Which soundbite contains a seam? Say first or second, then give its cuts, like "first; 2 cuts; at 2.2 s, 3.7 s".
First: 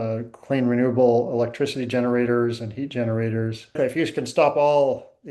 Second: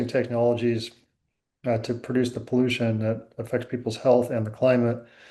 first; 1 cut; at 3.8 s